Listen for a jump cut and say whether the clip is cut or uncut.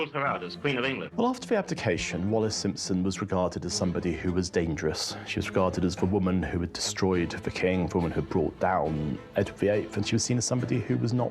cut